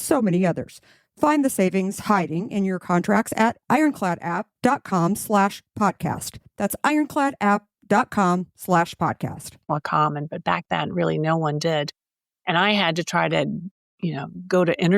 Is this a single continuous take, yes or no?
yes